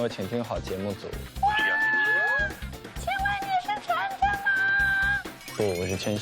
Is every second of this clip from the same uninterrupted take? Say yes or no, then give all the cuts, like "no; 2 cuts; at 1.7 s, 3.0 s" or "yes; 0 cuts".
no; 1 cut; at 1.2 s